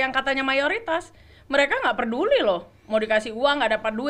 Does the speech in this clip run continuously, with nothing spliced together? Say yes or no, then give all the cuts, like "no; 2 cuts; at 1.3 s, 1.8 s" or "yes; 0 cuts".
yes; 0 cuts